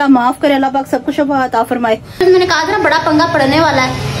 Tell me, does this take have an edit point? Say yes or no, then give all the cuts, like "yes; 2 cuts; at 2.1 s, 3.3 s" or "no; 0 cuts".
yes; 1 cut; at 2.2 s